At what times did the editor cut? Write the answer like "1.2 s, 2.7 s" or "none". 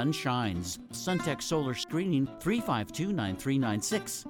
0.9 s, 2.3 s